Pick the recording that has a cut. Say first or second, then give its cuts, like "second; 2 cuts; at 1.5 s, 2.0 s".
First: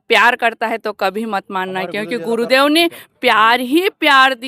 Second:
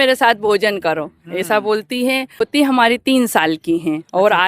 second; 1 cut; at 2.5 s